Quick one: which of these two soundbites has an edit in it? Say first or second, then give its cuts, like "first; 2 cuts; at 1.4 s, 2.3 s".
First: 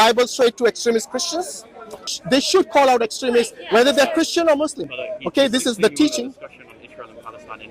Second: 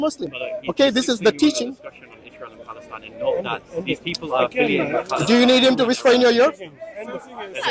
first; 1 cut; at 2.1 s